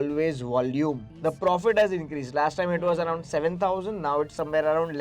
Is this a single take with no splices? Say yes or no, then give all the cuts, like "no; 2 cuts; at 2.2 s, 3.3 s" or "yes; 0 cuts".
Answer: no; 1 cut; at 1.1 s